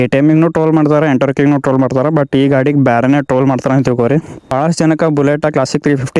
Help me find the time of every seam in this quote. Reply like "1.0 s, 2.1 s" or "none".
4.5 s